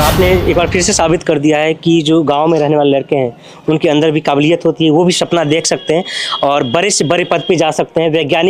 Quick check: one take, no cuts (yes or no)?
yes